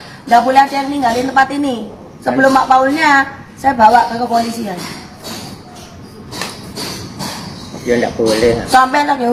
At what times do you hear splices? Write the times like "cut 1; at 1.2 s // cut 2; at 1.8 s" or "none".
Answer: none